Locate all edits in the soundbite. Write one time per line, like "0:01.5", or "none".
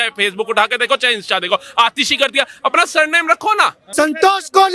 0:03.8

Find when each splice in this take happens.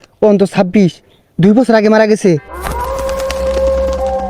0:02.4

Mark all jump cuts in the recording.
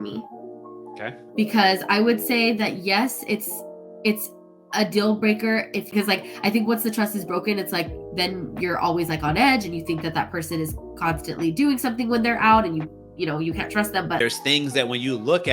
0:05.9
0:14.2

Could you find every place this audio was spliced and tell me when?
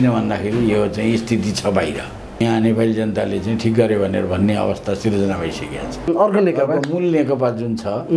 0:02.4
0:06.1

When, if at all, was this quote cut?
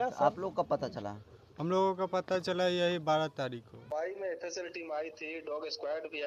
0:03.9

